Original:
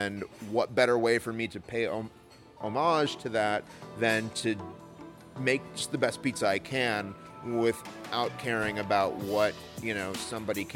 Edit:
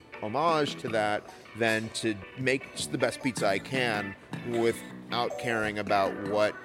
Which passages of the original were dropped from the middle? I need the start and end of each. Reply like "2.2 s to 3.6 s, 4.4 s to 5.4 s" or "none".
4.7 s to 5.3 s